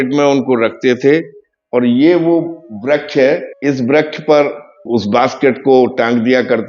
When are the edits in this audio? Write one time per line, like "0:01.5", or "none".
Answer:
0:03.5
0:04.8